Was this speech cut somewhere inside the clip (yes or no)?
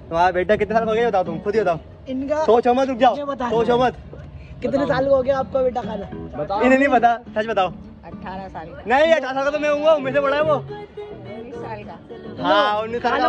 no